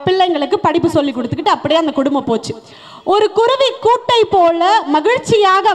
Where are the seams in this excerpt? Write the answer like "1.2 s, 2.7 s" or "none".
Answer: none